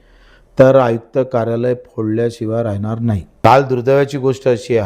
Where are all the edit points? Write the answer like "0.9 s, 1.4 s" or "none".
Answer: 3.5 s